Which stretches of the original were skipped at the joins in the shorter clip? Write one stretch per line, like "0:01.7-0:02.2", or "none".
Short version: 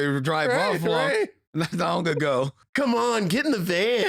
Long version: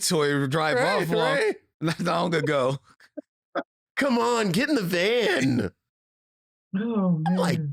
0:02.9-0:03.8